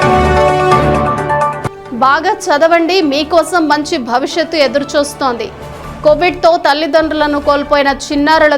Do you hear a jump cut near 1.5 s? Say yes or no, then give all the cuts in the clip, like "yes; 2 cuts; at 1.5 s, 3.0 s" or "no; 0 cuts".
yes; 1 cut; at 1.5 s